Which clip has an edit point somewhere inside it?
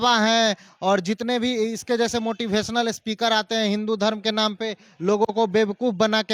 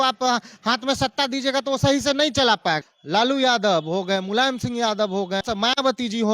second; 2 cuts; at 2.9 s, 5.4 s

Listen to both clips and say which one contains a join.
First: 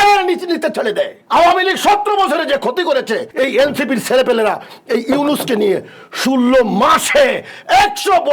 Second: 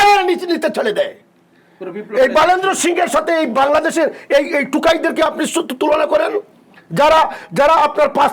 first; 2 cuts; at 1.2 s, 3.3 s

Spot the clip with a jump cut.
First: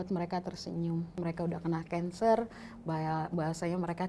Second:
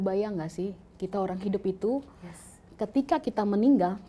first; 1 cut; at 1.1 s

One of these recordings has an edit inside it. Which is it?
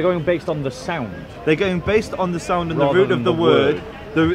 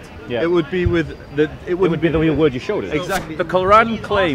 second; 1 cut; at 3.2 s

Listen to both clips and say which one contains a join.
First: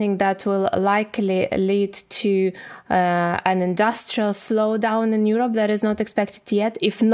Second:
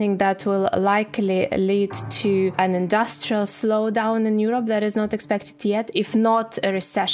second; 1 cut; at 2.5 s

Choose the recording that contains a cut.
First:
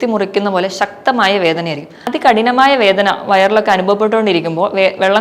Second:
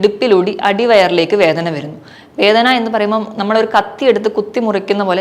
first; 1 cut; at 2.1 s

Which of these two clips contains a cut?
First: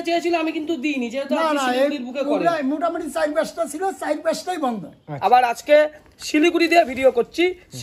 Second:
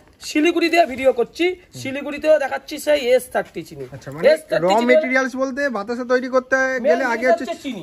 first; 1 cut; at 5.0 s

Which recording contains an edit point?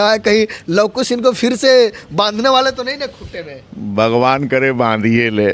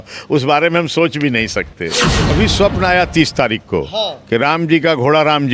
second; 1 cut; at 2.3 s

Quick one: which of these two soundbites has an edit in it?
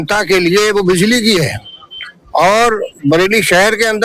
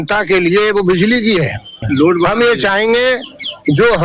second; 1 cut; at 1.9 s

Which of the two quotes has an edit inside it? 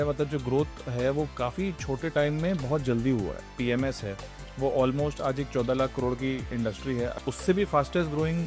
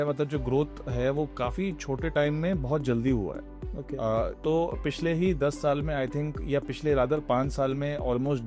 first; 2 cuts; at 3.6 s, 7.2 s

